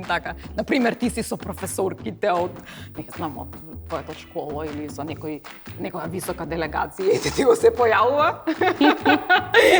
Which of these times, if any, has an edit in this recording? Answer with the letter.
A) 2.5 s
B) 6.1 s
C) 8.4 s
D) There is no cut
D